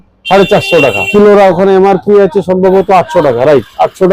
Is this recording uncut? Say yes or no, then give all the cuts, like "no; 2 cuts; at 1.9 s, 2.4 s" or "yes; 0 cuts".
no; 1 cut; at 1.1 s